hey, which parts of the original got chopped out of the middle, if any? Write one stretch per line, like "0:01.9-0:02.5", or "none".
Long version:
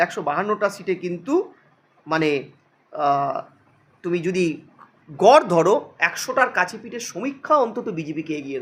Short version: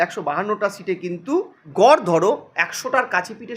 0:01.6-0:05.0